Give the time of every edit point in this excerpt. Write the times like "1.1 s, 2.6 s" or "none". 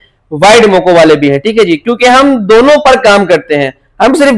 none